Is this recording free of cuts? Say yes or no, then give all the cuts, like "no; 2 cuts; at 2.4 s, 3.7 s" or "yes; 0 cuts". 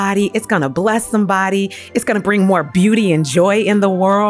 yes; 0 cuts